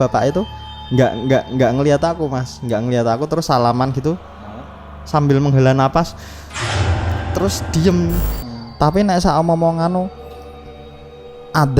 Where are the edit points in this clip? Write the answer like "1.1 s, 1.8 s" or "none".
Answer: 8.2 s